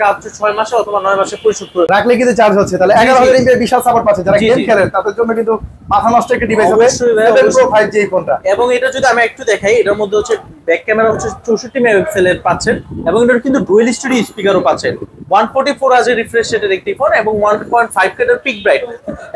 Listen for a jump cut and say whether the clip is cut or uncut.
cut